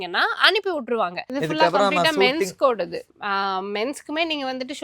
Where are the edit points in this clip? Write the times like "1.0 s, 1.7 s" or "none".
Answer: 1.2 s, 3.1 s

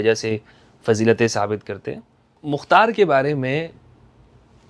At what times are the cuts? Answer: 2.5 s

